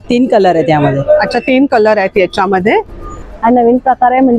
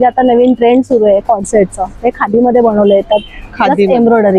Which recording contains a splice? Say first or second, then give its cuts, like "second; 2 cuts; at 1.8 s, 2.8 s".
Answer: first; 1 cut; at 3.2 s